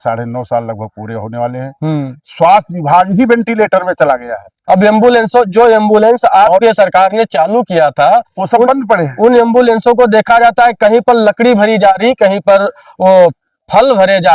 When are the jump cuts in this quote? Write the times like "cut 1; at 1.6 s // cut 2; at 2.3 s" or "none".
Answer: none